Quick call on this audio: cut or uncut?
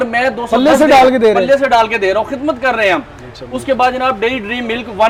uncut